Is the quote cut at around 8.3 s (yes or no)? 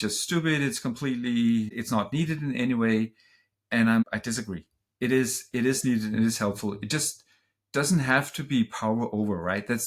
no